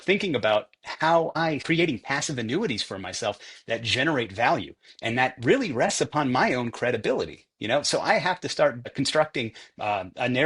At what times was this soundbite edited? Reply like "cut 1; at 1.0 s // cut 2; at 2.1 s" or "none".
cut 1; at 1.6 s // cut 2; at 8.9 s

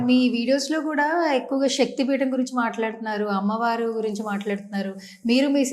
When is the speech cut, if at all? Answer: none

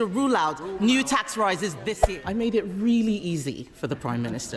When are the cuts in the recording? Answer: cut 1; at 2.0 s

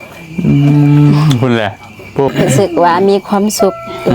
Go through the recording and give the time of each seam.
cut 1; at 2.3 s

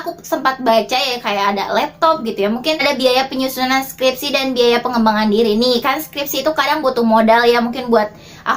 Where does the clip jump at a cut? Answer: cut 1; at 2.8 s

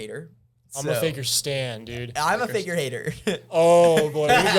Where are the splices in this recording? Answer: none

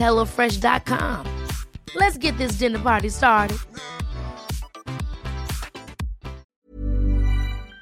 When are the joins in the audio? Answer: cut 1; at 6.5 s

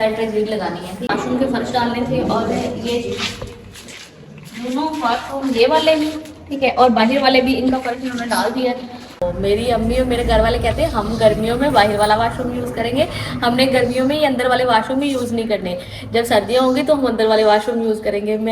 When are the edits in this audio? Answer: cut 1; at 1.1 s // cut 2; at 9.2 s

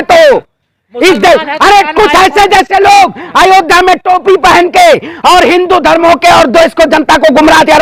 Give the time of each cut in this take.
none

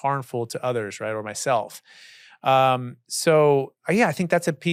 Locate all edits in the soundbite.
none

